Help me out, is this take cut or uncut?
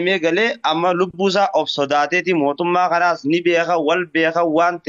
uncut